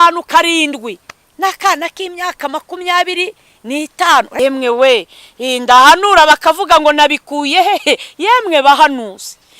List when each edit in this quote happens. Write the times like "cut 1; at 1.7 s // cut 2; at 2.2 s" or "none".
cut 1; at 4.3 s